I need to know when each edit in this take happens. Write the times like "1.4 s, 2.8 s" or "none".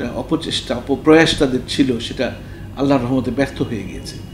1.0 s